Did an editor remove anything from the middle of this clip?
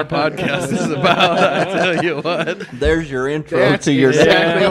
no; 0 cuts

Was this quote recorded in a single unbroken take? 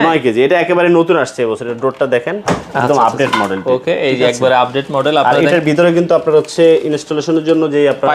yes; 0 cuts

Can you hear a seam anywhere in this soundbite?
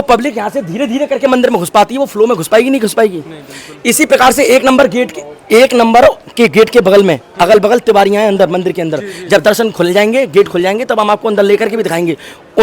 no; 0 cuts

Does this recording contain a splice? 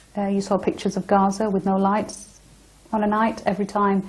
no; 0 cuts

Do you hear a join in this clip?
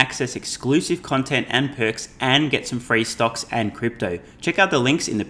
no; 0 cuts

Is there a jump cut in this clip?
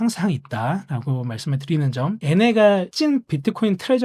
yes; 1 cut; at 2.2 s

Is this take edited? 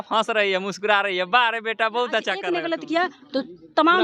yes; 1 cut; at 2.4 s

